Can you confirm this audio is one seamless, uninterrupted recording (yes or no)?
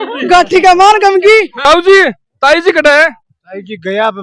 no